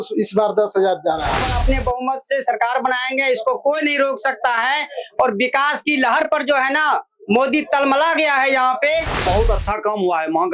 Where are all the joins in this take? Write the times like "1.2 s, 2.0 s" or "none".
1.4 s, 9.2 s